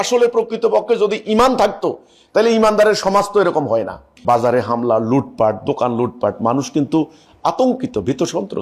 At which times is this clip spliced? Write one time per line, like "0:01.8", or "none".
0:04.1